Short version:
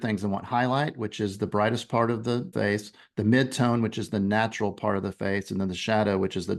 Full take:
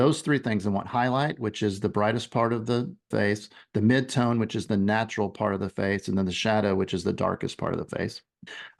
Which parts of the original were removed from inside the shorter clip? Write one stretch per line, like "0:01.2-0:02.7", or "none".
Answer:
0:02.9-0:03.1